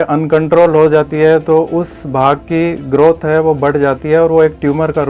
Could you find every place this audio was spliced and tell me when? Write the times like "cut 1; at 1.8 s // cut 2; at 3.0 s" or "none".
none